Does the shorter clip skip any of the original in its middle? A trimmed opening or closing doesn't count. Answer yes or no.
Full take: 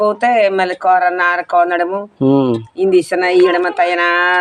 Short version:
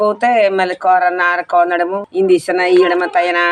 yes